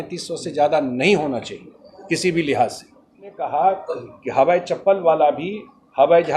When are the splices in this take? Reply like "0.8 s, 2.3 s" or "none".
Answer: 3.4 s